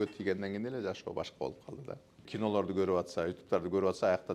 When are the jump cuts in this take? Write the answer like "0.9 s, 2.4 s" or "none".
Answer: 2.3 s